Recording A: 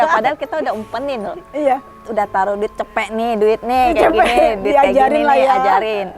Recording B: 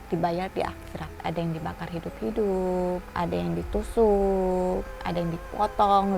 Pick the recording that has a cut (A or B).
B